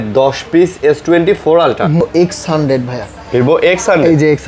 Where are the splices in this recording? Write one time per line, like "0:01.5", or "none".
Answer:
0:02.0